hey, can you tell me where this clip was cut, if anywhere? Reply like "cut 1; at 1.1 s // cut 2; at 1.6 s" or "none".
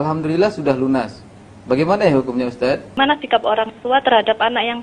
cut 1; at 3.0 s